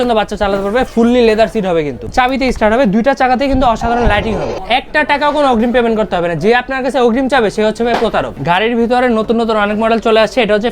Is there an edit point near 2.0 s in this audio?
yes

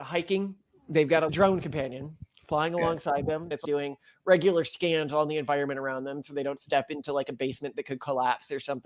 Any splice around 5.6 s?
no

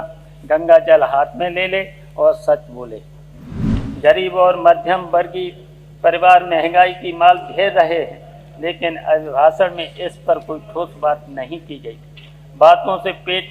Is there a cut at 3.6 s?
yes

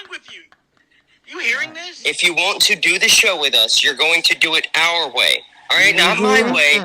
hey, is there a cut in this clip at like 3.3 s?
no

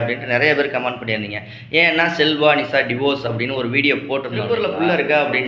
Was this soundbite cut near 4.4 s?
yes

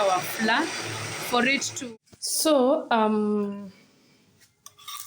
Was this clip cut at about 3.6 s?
no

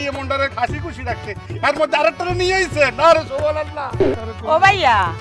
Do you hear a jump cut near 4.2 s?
yes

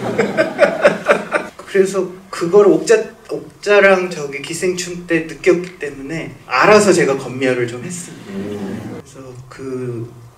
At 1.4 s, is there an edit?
yes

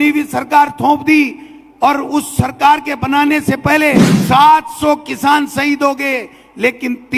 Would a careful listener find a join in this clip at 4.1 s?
yes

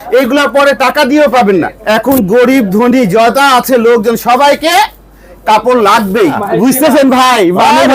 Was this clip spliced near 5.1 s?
no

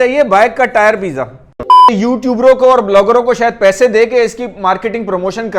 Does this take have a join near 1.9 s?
yes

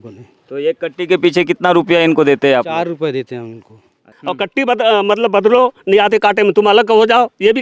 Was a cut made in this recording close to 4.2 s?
yes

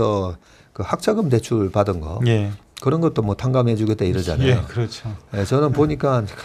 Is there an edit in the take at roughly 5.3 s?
no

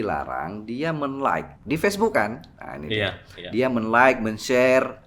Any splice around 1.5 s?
yes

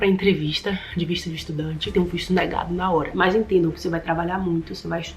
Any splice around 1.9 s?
yes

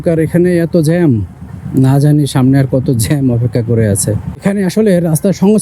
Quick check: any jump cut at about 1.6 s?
no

